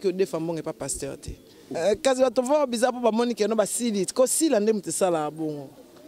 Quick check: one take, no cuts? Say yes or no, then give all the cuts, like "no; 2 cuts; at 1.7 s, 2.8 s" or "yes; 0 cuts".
no; 1 cut; at 1.7 s